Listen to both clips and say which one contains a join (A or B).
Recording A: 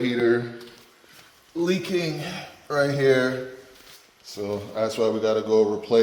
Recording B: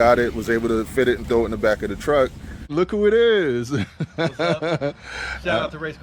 B